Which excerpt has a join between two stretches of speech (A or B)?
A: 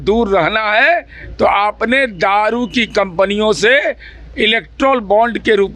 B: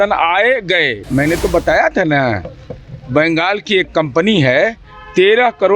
B